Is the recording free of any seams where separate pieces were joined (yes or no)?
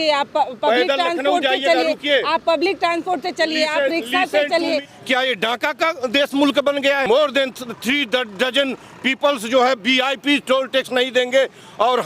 no